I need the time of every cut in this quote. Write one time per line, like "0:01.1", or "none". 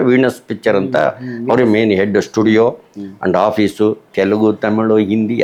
none